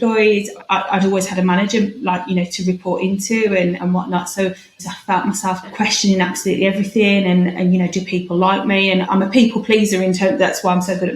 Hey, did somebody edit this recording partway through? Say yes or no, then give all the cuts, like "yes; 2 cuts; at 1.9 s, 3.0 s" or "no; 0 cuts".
yes; 1 cut; at 4.9 s